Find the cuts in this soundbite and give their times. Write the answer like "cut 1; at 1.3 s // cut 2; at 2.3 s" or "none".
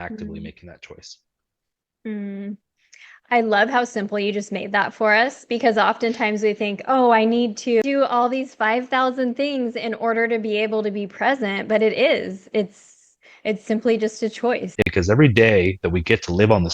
cut 1; at 7.8 s // cut 2; at 14.9 s